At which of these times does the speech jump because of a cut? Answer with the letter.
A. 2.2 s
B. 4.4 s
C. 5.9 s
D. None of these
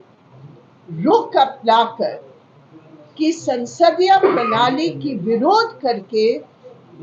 D